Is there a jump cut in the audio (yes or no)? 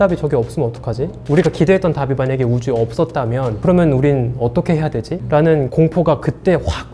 no